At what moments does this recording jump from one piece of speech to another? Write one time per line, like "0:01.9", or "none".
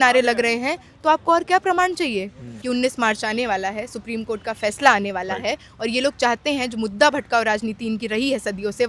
0:02.5